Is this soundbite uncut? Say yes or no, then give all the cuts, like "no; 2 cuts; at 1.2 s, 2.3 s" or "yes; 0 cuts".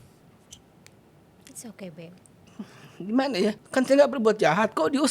no; 2 cuts; at 1.4 s, 3.6 s